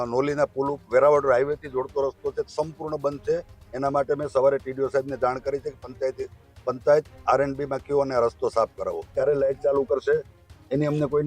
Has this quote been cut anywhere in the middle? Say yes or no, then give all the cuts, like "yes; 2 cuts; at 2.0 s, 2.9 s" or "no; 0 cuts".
no; 0 cuts